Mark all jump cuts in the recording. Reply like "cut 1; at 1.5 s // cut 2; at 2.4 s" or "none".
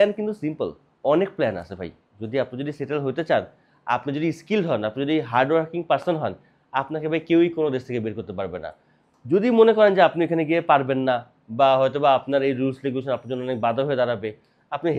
none